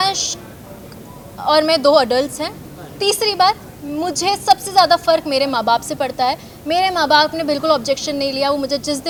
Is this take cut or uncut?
uncut